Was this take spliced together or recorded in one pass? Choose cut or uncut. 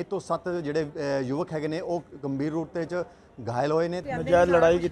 cut